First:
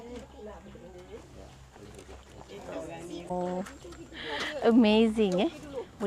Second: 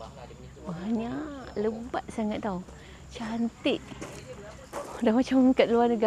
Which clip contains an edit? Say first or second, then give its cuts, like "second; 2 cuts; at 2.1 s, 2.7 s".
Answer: first; 1 cut; at 3.3 s